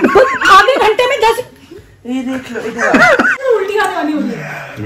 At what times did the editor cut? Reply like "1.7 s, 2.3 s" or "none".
3.4 s

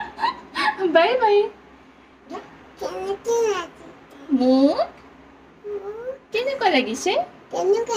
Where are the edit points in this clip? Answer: 2.4 s

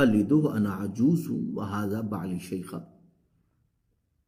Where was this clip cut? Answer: none

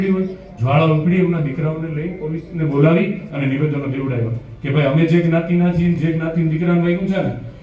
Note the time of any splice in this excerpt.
none

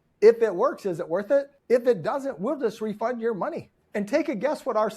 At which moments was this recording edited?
1.6 s, 3.7 s

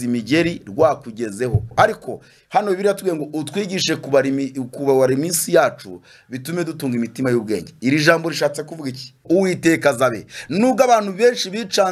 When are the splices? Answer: 1.7 s, 9.2 s

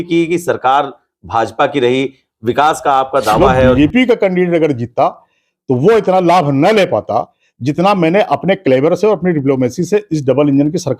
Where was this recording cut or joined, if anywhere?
3.8 s

